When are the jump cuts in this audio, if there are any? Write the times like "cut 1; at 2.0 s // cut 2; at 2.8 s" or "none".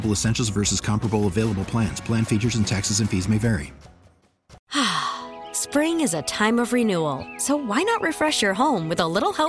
cut 1; at 4.5 s